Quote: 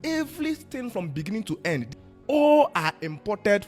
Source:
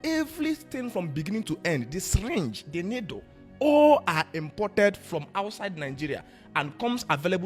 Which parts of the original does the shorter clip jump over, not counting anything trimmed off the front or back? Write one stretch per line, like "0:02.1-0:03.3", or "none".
0:02.0-0:03.3